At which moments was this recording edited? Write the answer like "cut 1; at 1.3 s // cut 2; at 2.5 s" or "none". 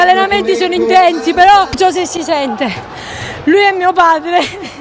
cut 1; at 1.8 s